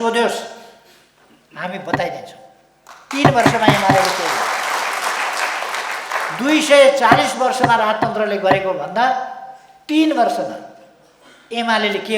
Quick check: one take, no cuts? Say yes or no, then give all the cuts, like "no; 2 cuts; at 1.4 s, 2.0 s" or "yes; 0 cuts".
yes; 0 cuts